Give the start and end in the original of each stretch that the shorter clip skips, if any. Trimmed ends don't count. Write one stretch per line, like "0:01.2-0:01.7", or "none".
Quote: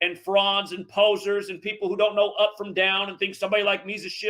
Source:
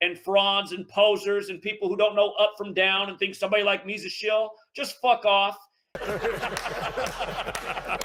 none